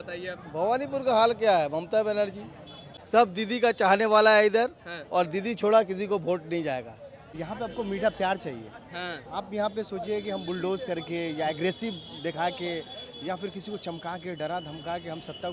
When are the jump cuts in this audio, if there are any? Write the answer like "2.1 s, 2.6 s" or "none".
2.9 s, 7.3 s